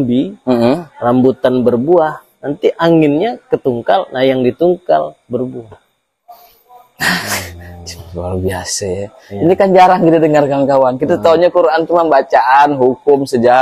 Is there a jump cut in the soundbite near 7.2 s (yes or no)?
no